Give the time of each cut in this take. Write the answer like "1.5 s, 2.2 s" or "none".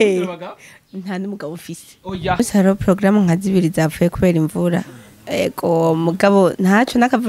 2.4 s